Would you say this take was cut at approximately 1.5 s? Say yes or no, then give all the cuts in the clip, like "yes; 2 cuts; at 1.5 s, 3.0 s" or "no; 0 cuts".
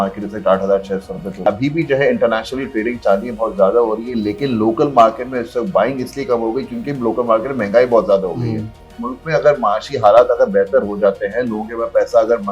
yes; 2 cuts; at 1.5 s, 9.0 s